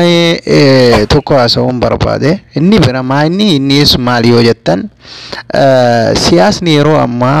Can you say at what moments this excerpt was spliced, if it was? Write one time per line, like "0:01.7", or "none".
0:03.6

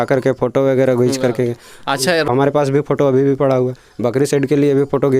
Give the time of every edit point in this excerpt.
0:02.3

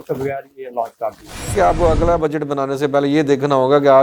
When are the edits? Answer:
0:01.5

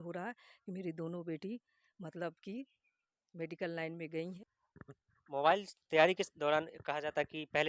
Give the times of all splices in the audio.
none

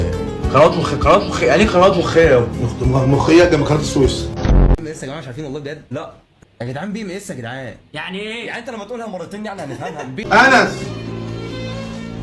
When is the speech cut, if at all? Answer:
0:04.8
0:10.2

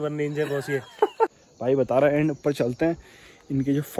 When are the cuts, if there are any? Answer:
0:01.5

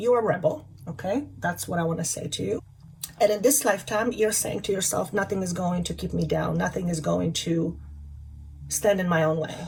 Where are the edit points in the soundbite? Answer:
none

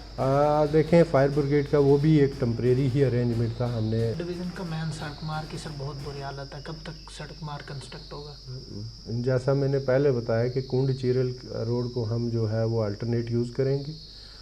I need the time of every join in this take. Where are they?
0:04.2

